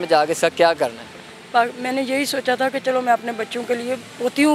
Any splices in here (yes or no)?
no